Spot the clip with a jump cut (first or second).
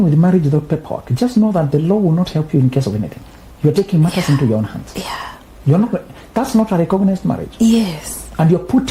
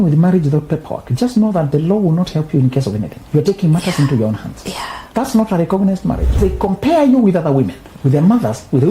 second